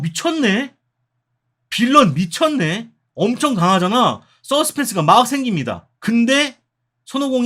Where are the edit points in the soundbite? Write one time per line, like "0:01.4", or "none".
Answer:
0:05.8